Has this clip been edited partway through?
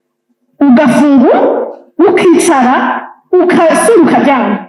no; 0 cuts

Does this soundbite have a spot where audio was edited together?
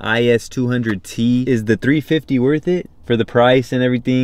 yes; 2 cuts; at 1.4 s, 2.9 s

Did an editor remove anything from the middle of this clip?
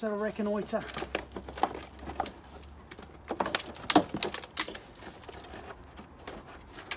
no; 0 cuts

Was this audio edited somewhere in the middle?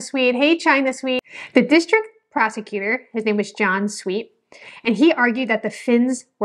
yes; 1 cut; at 1.2 s

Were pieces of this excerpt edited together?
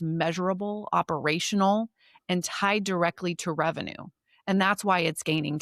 no; 0 cuts

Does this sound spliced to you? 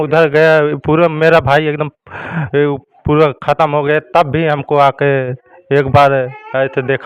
no; 0 cuts

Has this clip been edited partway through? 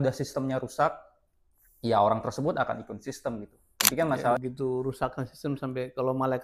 yes; 1 cut; at 4.4 s

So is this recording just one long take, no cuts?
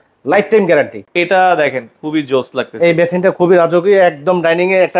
no; 1 cut; at 1.0 s

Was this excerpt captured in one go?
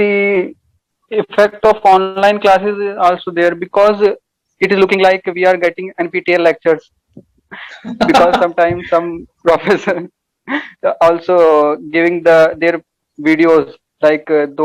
yes; 0 cuts

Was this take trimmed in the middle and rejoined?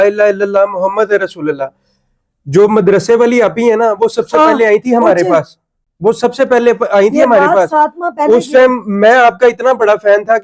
no; 0 cuts

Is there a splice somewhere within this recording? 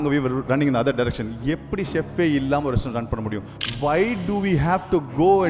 yes; 1 cut; at 3.6 s

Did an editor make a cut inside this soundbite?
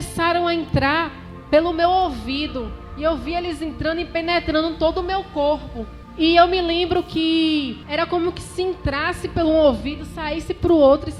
yes; 2 cuts; at 6.0 s, 7.8 s

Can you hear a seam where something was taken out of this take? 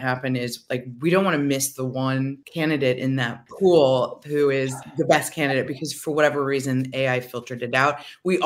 yes; 3 cuts; at 2.4 s, 3.4 s, 4.8 s

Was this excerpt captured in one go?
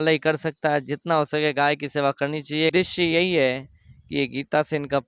no; 1 cut; at 2.7 s

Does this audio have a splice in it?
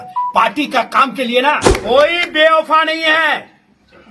yes; 1 cut; at 1.7 s

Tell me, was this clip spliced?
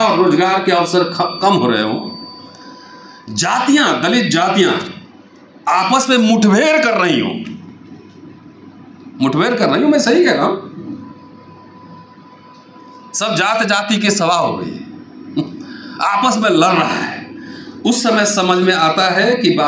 no; 0 cuts

